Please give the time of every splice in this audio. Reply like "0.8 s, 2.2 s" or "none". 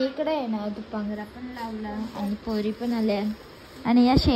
none